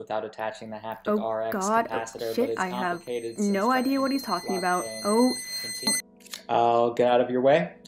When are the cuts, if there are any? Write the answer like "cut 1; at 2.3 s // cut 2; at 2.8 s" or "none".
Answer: cut 1; at 5.9 s